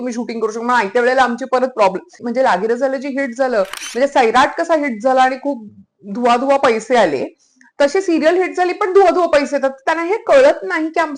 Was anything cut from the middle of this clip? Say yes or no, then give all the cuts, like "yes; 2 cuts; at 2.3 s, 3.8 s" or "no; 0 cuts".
yes; 1 cut; at 2.2 s